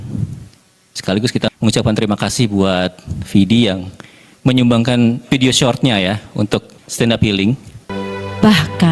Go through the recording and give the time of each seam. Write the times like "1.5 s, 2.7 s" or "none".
7.9 s

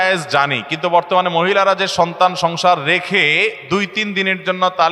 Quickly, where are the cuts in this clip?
none

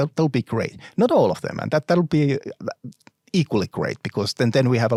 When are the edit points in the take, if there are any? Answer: none

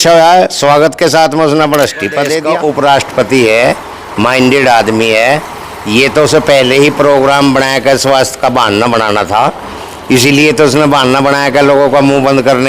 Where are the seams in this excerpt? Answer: 2.4 s

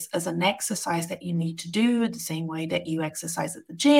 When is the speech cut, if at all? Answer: none

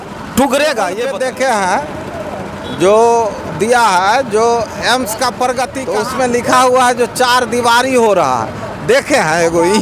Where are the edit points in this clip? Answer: 1.1 s, 5.8 s

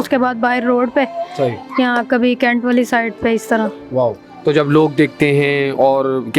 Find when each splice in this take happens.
none

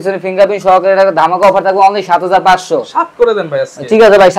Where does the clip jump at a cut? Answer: none

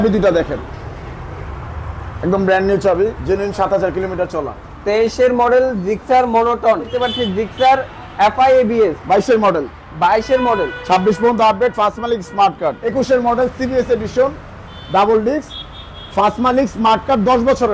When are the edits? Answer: 6.9 s, 12.8 s

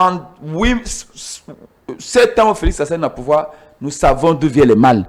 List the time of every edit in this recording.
none

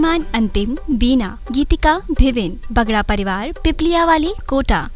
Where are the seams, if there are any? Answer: 1.6 s

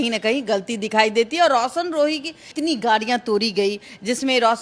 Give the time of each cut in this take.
2.5 s

